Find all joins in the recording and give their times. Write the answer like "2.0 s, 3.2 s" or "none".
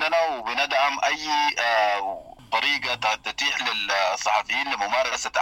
2.4 s